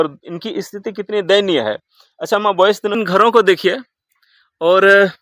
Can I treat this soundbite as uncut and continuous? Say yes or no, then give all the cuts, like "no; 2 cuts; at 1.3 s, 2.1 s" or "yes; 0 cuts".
no; 1 cut; at 3.0 s